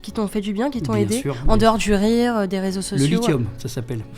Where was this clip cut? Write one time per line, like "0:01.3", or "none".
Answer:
none